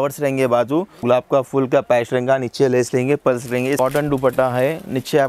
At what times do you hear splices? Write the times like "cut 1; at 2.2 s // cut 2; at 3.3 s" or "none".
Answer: cut 1; at 0.9 s // cut 2; at 3.8 s